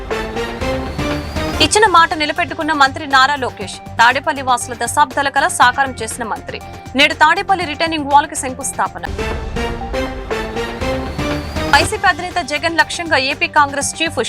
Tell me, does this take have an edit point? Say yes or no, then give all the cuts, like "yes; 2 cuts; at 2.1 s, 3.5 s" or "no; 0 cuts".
yes; 1 cut; at 1.3 s